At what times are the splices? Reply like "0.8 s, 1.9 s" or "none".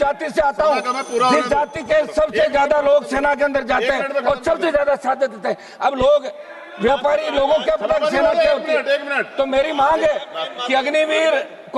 none

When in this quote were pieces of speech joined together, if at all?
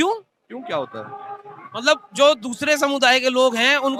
none

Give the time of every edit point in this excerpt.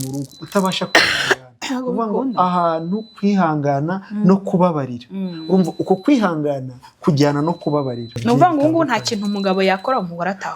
8.1 s

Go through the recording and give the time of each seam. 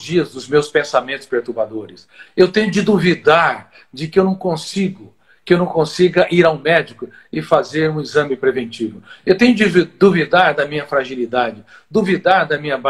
none

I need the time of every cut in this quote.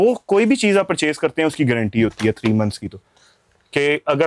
none

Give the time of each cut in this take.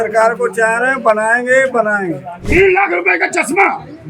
2.3 s

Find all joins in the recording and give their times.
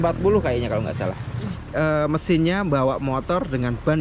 1.6 s

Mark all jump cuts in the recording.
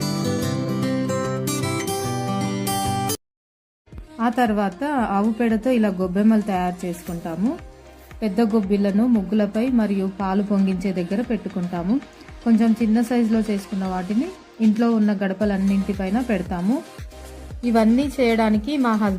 2.4 s

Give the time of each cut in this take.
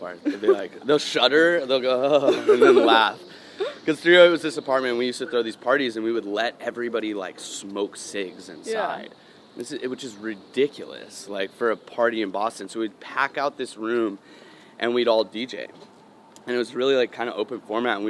none

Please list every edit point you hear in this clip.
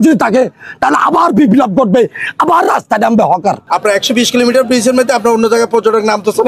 none

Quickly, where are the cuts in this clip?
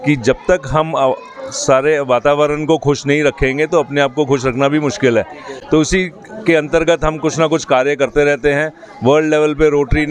none

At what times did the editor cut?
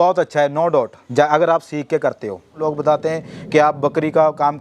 1.0 s, 2.6 s

